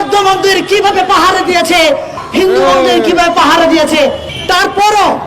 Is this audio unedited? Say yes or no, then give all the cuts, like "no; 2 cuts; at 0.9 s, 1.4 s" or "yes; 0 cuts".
no; 2 cuts; at 2.2 s, 4.3 s